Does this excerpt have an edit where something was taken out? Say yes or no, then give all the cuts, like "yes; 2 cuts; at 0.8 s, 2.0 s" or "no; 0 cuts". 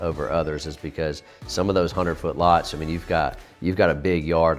no; 0 cuts